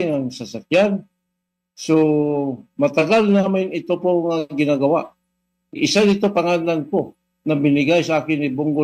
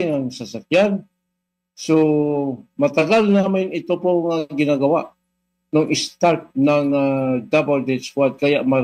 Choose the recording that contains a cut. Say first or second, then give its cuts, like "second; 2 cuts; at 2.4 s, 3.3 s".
first; 1 cut; at 5.7 s